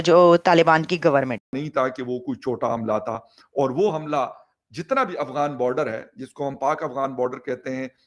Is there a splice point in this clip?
yes; 1 cut; at 1.7 s

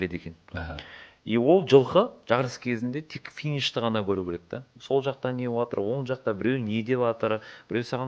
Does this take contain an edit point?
no; 0 cuts

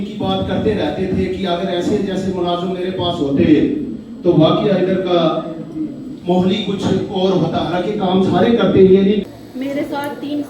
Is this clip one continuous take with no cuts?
no; 1 cut; at 9.2 s

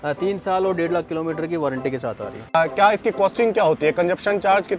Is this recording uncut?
no; 1 cut; at 2.6 s

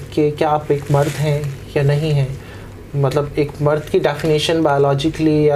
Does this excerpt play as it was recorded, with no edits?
yes; 0 cuts

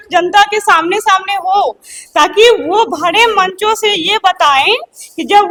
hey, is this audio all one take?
yes; 0 cuts

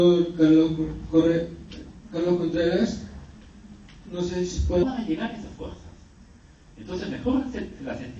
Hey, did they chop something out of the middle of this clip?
no; 0 cuts

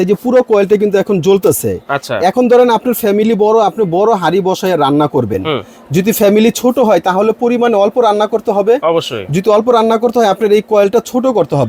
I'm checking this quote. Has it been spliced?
no; 0 cuts

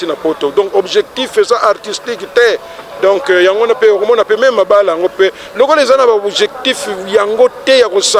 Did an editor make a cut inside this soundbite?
no; 0 cuts

